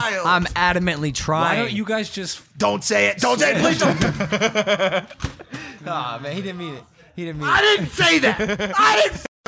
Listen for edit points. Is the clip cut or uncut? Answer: uncut